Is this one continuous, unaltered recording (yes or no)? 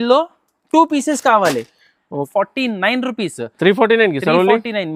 no